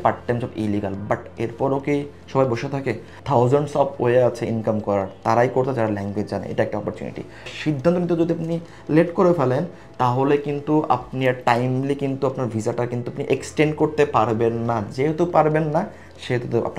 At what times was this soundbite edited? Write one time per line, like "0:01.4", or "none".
0:03.2
0:07.5